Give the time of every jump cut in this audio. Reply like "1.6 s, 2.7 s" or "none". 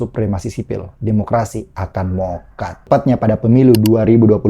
2.8 s